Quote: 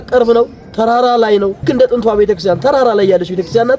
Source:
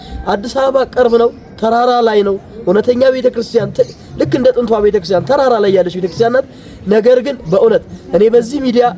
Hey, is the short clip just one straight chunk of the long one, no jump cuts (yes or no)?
no